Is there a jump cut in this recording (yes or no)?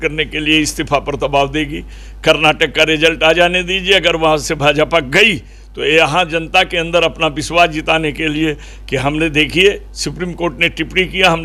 no